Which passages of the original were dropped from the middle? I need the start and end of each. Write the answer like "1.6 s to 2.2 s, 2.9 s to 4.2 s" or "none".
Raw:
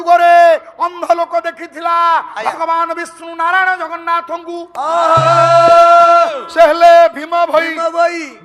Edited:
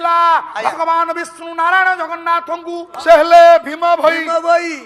4.7 s to 6.4 s